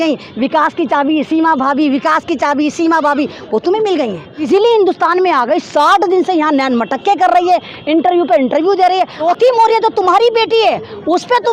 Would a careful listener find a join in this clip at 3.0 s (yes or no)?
no